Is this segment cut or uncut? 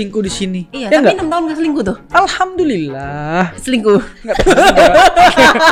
uncut